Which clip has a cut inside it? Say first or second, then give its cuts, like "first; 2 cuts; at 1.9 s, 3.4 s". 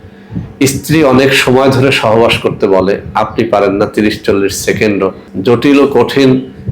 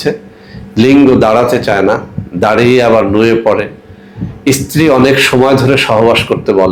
first; 1 cut; at 5.3 s